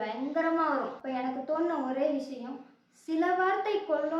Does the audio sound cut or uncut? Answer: cut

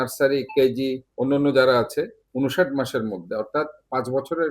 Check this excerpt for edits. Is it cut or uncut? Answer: cut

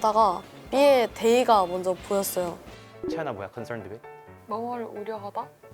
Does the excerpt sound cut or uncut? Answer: cut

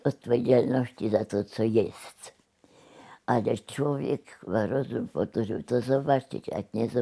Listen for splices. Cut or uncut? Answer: uncut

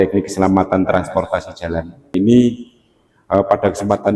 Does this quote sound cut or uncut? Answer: cut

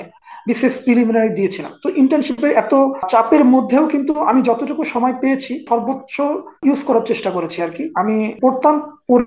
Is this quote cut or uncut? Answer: cut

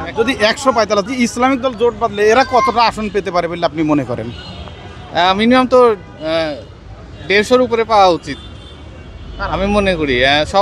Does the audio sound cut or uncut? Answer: cut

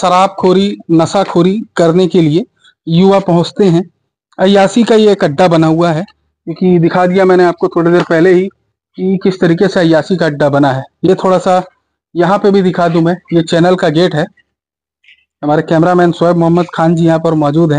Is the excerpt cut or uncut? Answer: uncut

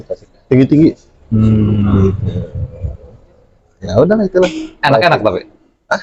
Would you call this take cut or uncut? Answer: uncut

